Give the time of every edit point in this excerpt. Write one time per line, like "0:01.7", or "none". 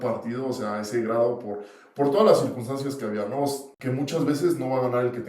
0:03.7

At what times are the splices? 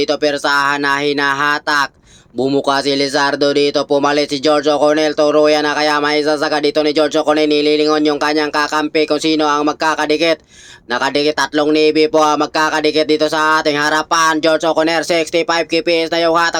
none

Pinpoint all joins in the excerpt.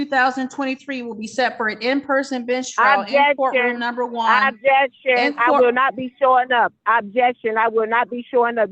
none

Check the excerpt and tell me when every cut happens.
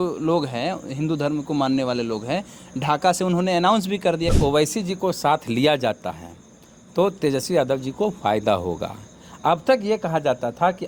0:04.3

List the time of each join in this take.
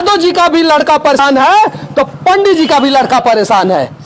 0:01.1

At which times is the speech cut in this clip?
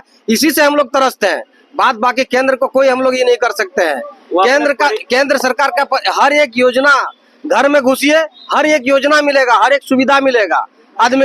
none

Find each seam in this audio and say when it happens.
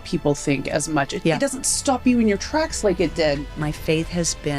0:01.1
0:03.4

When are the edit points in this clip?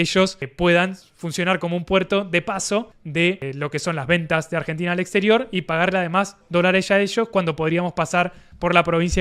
none

